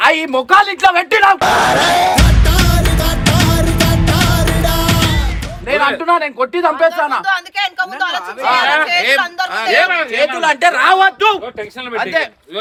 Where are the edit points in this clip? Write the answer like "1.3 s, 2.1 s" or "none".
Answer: none